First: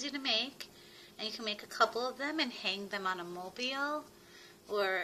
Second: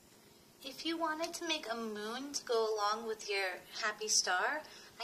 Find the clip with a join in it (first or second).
second